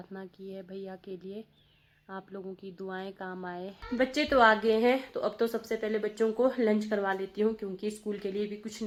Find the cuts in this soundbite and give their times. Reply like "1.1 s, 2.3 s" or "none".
none